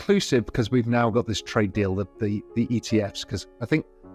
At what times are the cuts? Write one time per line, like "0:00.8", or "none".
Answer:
none